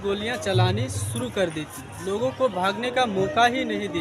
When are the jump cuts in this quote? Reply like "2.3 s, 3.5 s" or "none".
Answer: none